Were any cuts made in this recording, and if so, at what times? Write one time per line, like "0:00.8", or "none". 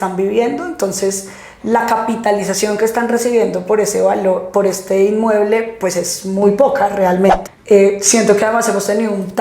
0:07.5